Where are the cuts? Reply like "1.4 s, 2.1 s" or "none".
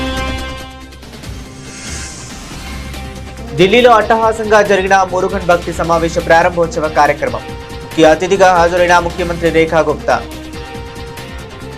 1.6 s, 3.6 s, 10.4 s